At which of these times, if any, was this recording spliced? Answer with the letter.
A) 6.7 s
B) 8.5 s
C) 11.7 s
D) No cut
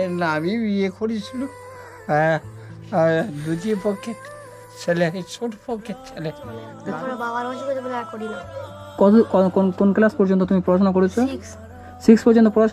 A